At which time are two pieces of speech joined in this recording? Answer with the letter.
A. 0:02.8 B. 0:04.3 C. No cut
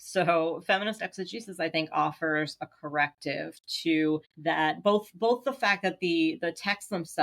B